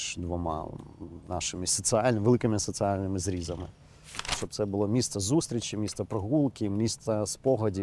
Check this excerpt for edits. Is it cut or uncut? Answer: cut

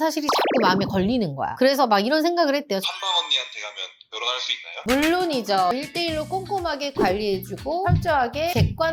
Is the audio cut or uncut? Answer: uncut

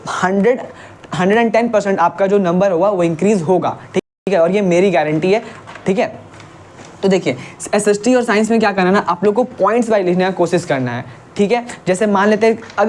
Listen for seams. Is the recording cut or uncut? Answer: uncut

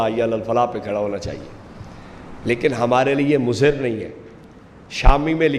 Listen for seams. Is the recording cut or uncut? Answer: uncut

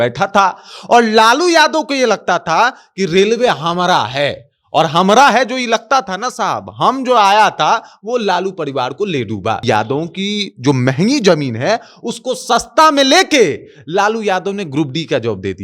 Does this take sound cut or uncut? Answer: cut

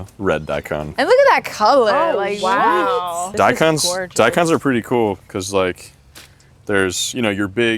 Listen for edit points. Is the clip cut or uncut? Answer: cut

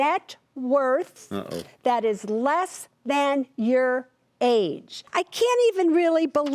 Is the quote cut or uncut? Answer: cut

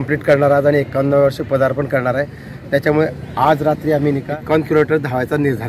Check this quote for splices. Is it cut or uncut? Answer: cut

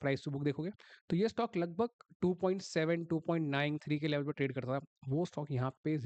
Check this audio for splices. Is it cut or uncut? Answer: uncut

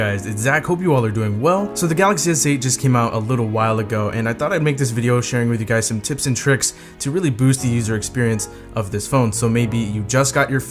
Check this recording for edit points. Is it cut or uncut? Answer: uncut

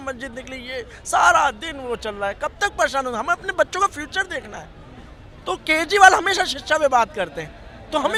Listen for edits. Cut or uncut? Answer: uncut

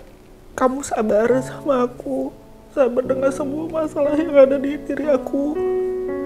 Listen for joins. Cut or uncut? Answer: uncut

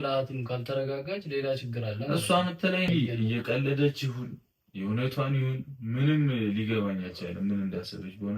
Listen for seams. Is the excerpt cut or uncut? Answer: cut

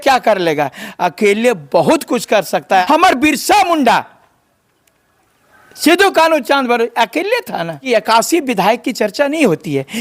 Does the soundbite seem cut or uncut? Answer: cut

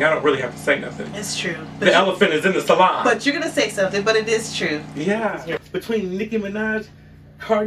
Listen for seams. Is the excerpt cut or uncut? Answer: cut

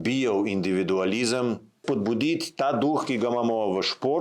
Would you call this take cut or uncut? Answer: cut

